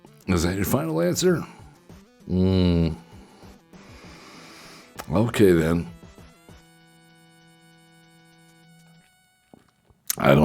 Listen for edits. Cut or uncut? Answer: uncut